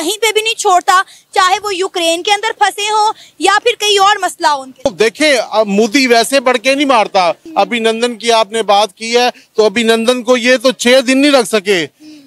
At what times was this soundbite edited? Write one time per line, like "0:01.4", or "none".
0:04.9
0:07.4